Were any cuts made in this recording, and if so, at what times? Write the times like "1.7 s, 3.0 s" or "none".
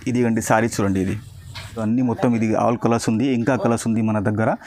1.8 s